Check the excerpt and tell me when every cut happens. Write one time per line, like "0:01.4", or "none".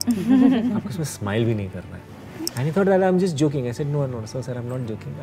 none